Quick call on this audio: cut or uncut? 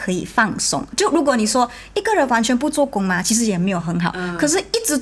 uncut